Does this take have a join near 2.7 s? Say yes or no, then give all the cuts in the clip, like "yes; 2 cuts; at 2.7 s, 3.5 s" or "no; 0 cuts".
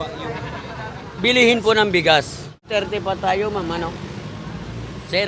yes; 1 cut; at 2.7 s